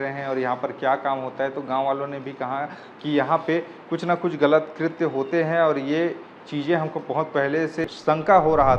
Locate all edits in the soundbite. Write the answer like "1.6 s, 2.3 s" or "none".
7.8 s